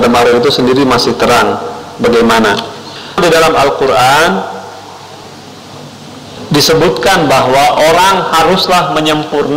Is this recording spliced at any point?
yes; 1 cut; at 3.2 s

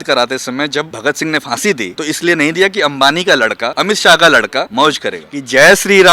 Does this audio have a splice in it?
yes; 4 cuts; at 0.9 s, 1.9 s, 3.7 s, 4.9 s

